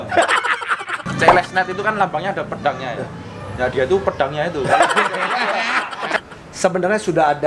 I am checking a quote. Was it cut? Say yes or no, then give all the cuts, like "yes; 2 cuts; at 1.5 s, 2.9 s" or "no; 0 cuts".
yes; 2 cuts; at 1.0 s, 6.2 s